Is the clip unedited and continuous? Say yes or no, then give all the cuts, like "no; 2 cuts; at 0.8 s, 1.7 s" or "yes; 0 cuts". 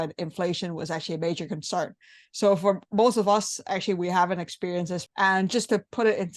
no; 1 cut; at 5.0 s